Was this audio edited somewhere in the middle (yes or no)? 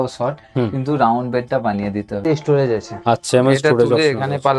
yes